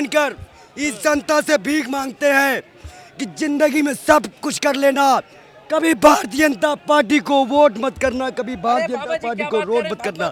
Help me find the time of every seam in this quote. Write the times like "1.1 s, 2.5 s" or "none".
none